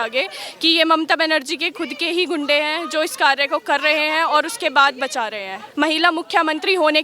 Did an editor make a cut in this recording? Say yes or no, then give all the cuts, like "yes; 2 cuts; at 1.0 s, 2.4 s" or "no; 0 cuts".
yes; 1 cut; at 5.6 s